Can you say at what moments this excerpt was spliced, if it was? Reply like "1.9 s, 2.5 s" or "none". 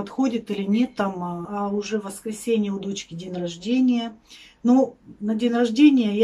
1.5 s

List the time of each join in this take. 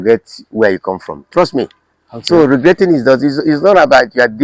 none

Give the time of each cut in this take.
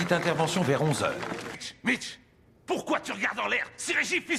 1.5 s

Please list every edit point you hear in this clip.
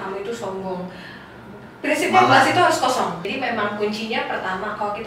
3.3 s

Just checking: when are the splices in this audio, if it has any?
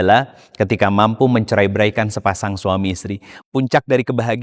3.4 s

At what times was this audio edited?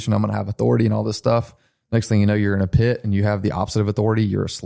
none

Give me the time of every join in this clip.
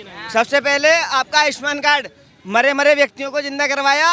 none

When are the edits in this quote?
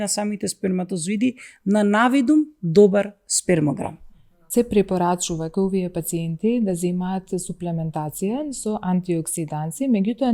4.4 s

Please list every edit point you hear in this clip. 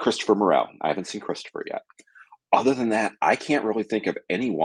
none

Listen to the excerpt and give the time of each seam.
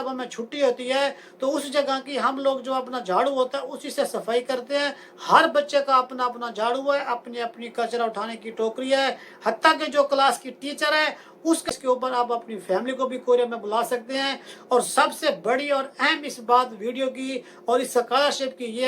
11.7 s

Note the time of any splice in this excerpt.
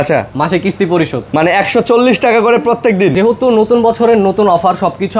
3.1 s

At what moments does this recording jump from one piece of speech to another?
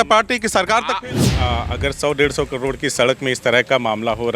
1.2 s

